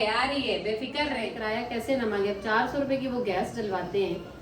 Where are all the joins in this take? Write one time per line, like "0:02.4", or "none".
0:01.3